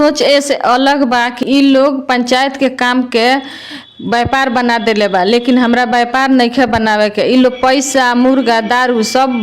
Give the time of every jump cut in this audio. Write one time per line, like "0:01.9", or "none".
0:01.4